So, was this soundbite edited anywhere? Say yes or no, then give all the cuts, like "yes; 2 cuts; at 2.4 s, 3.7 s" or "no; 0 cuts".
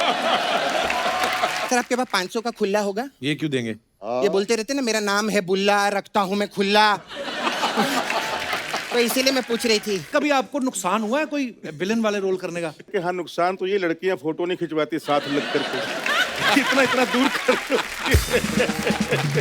yes; 3 cuts; at 1.6 s, 10.1 s, 12.9 s